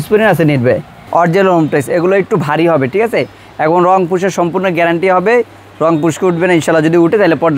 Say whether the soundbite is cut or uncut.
cut